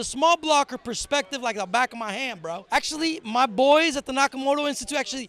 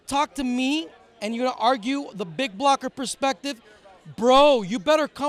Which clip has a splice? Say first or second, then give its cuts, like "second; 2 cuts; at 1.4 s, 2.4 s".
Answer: first; 1 cut; at 2.6 s